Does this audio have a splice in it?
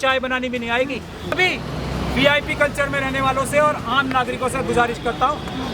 yes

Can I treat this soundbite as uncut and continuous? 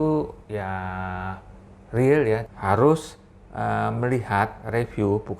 no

